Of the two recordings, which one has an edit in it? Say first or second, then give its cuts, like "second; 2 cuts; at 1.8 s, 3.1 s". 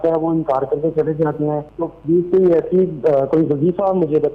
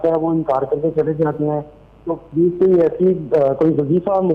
first; 1 cut; at 1.7 s